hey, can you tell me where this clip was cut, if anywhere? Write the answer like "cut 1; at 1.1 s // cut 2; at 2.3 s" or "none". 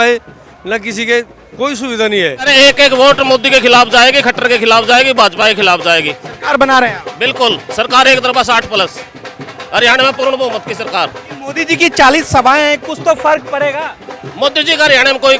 cut 1; at 2.5 s // cut 2; at 11.3 s